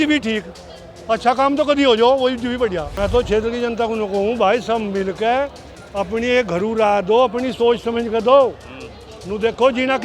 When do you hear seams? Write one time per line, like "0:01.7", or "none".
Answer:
0:02.9